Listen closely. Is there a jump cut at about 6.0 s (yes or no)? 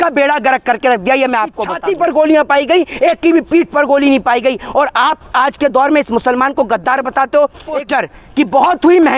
no